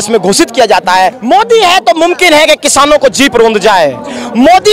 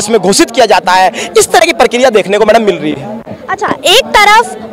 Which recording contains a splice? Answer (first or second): first